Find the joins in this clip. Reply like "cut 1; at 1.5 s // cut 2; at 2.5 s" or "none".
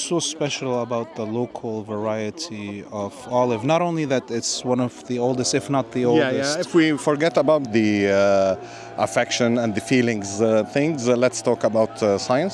cut 1; at 7.7 s